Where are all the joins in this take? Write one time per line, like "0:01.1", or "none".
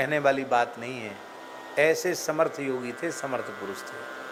none

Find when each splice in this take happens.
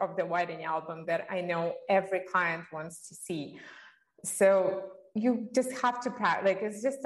none

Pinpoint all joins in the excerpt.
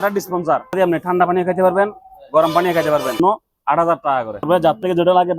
0:00.8
0:03.2
0:04.4

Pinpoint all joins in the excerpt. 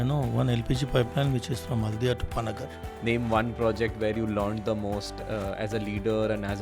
0:02.8

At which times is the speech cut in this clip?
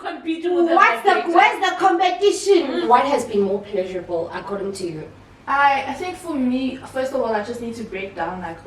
none

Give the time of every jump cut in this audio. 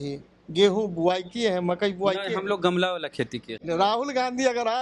0:03.5

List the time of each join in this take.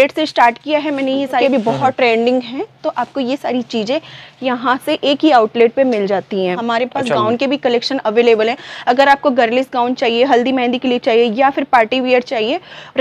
0:01.4
0:06.6

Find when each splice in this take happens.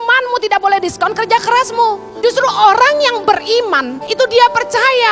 0:02.1
0:04.0

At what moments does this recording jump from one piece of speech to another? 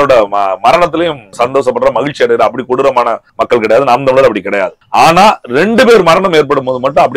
0:01.3
0:03.3
0:04.8

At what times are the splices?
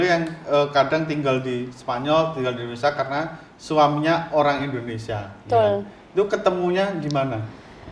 none

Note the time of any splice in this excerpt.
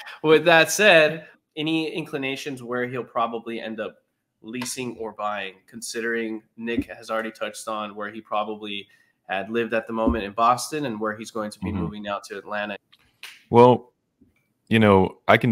0:01.3
0:12.8

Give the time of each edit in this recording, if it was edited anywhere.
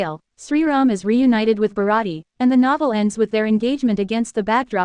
none

